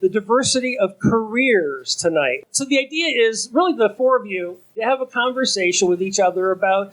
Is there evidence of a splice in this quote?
yes; 2 cuts; at 2.5 s, 4.8 s

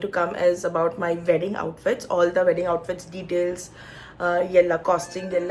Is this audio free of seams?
yes; 0 cuts

